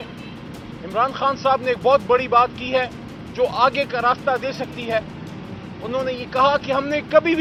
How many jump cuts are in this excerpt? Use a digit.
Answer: 0